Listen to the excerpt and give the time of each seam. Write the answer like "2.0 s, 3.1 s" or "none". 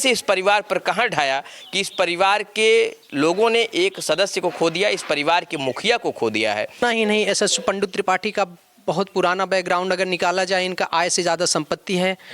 6.8 s